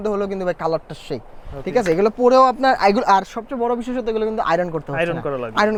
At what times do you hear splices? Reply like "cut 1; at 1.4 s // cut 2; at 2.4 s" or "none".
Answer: none